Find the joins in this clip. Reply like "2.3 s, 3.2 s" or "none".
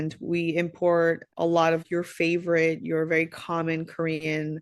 1.8 s